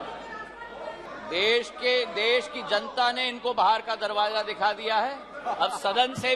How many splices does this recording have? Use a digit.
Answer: 1